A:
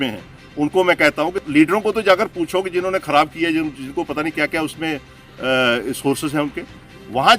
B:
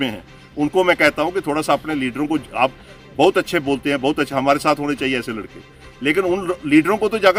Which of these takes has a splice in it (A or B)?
A